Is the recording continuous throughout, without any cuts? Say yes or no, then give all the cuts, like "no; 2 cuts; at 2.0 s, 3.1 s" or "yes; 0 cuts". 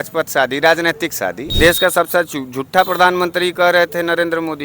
no; 1 cut; at 1.4 s